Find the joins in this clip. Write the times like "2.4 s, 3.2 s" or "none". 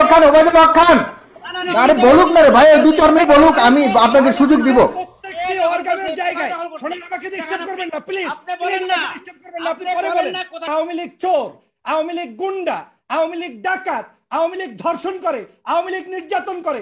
3.2 s, 10.7 s